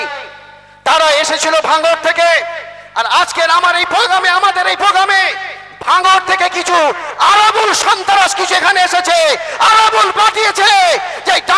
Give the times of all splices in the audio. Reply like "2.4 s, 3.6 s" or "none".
none

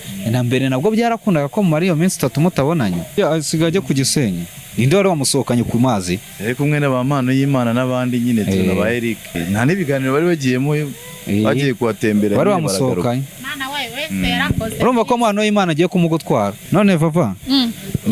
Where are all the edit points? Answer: 3.1 s, 9.4 s, 16.6 s

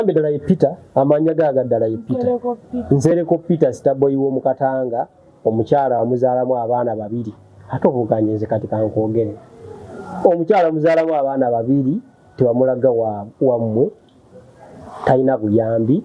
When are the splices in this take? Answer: none

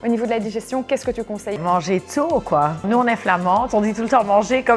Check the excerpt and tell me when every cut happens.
1.6 s, 2.9 s

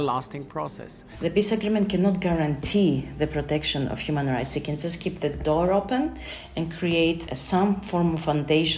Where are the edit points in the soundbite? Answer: 1.0 s, 7.2 s

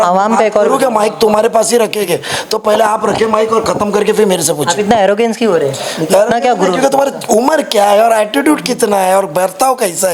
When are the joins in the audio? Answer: none

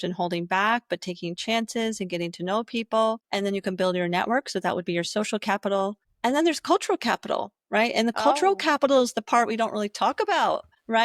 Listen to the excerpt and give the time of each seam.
none

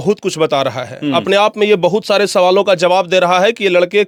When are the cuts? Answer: none

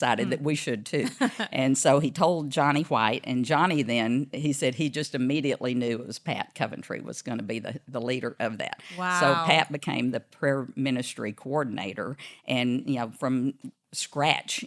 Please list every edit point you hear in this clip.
none

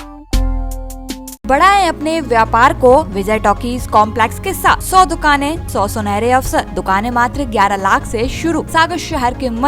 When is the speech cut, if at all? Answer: 1.5 s, 3.1 s, 4.8 s, 5.6 s, 6.7 s, 8.7 s

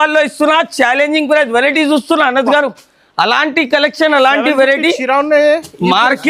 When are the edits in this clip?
none

